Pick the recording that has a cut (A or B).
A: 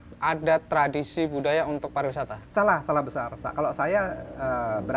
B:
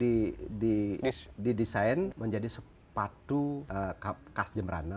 B